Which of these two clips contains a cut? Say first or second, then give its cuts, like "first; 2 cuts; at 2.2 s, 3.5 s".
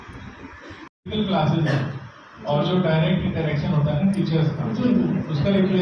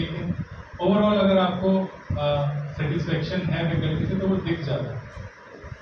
first; 1 cut; at 1.0 s